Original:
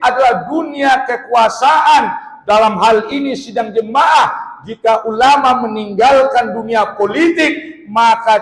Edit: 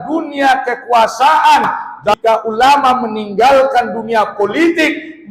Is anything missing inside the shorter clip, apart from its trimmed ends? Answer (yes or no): yes